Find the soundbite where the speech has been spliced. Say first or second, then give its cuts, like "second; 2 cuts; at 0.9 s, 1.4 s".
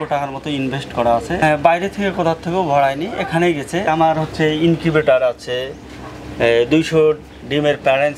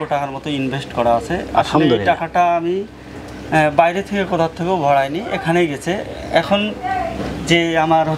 first; 2 cuts; at 1.4 s, 3.9 s